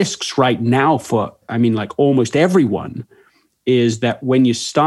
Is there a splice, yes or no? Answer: yes